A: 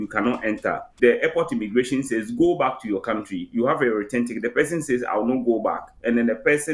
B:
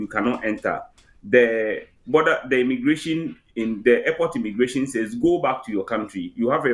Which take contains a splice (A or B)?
A